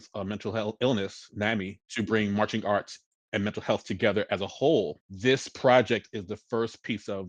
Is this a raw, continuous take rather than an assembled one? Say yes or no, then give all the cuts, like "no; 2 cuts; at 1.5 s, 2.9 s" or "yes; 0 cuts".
no; 2 cuts; at 1.8 s, 5.0 s